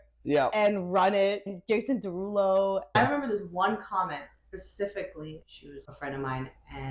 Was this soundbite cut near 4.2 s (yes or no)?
no